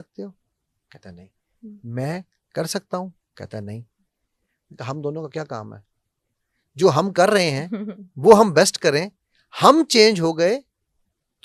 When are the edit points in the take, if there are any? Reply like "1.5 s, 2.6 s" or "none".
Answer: none